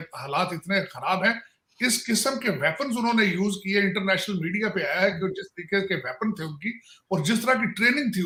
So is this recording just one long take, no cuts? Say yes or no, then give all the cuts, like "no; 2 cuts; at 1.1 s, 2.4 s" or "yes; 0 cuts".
yes; 0 cuts